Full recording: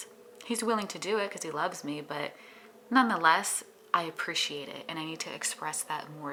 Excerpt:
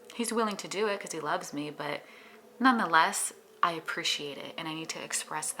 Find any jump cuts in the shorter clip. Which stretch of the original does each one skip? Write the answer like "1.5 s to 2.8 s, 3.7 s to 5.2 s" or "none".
none